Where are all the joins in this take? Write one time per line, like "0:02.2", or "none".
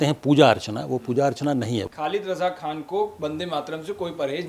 0:01.9